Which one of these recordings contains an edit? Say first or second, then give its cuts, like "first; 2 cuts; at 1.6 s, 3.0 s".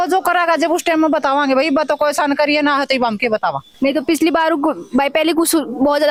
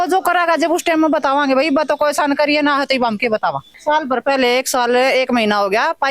second; 1 cut; at 3.7 s